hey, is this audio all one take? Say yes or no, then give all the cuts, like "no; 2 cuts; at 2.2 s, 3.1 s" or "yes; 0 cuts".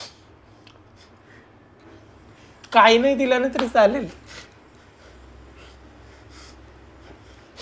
yes; 0 cuts